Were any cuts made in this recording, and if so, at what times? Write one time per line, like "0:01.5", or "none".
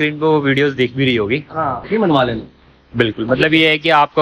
0:01.8